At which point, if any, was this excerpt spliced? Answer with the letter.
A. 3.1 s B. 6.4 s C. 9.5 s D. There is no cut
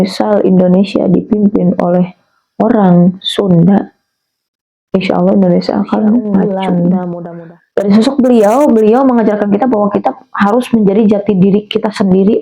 B